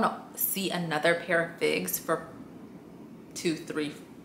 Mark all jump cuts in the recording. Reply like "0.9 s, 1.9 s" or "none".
none